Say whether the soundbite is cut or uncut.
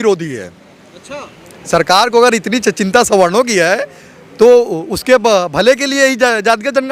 uncut